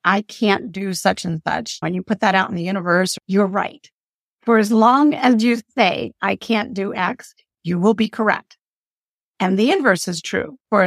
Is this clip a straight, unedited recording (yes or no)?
no